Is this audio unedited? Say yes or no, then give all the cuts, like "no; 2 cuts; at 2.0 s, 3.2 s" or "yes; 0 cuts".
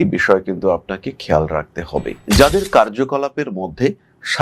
no; 1 cut; at 2.2 s